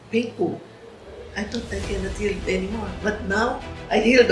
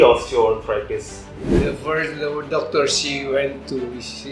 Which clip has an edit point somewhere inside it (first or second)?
second